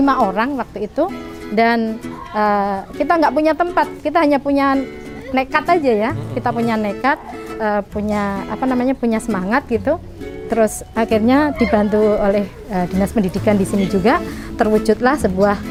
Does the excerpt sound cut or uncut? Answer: uncut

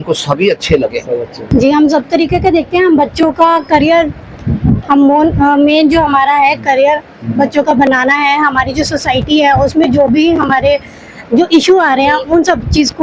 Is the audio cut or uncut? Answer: cut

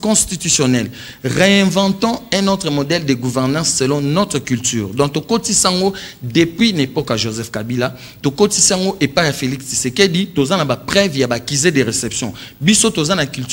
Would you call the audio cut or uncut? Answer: uncut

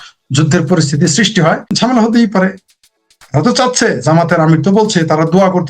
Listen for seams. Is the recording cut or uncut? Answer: cut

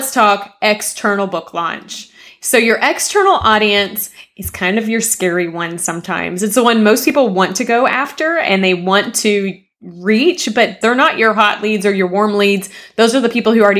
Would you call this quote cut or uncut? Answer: cut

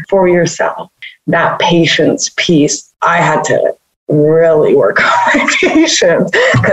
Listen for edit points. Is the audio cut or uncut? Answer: cut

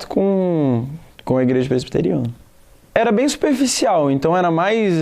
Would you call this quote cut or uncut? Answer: cut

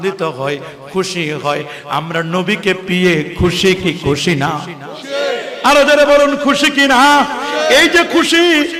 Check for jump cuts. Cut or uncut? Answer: uncut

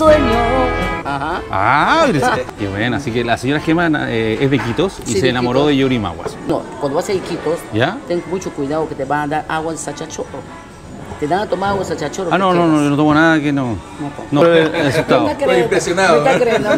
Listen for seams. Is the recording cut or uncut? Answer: uncut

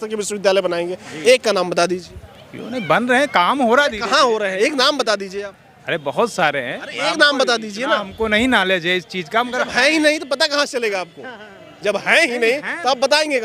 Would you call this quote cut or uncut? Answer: uncut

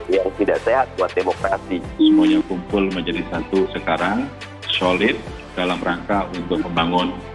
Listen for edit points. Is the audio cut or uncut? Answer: cut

